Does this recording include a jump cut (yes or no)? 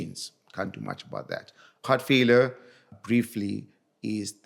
yes